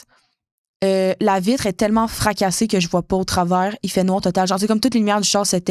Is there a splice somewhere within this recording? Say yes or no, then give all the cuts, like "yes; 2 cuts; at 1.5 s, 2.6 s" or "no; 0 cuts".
no; 0 cuts